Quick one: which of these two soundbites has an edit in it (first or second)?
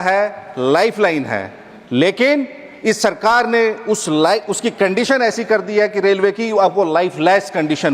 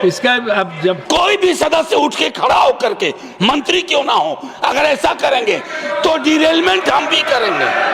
second